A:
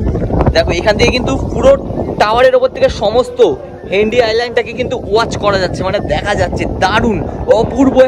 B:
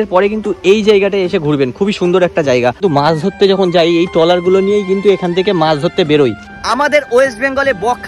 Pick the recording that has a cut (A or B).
B